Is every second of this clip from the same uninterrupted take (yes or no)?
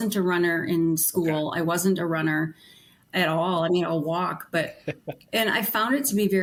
yes